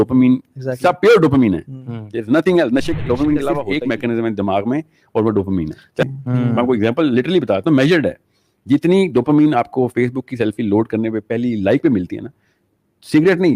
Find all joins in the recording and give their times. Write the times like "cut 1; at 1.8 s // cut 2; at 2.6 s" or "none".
cut 1; at 3.6 s // cut 2; at 6.0 s

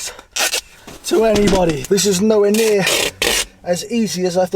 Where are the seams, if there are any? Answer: cut 1; at 1.8 s

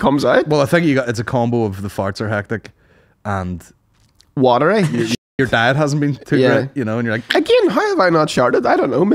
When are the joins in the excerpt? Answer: none

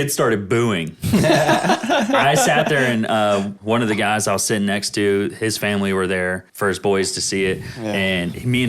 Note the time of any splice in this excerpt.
cut 1; at 3.5 s // cut 2; at 6.5 s

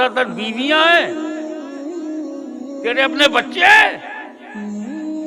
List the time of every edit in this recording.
cut 1; at 1.1 s // cut 2; at 2.8 s // cut 3; at 4.0 s

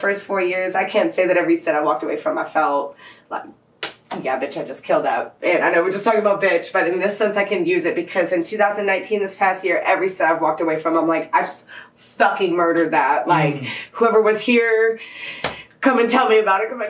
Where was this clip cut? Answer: none

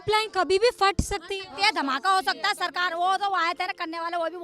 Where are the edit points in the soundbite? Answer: none

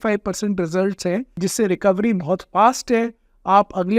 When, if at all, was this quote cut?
cut 1; at 1.3 s

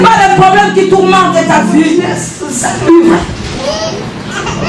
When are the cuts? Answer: cut 1; at 2.0 s

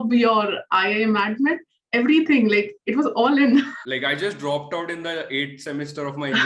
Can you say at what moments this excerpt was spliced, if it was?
cut 1; at 3.8 s

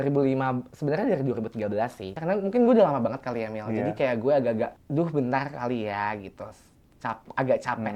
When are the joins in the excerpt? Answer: cut 1; at 2.1 s // cut 2; at 4.9 s

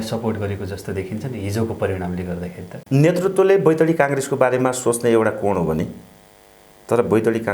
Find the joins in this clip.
cut 1; at 2.7 s

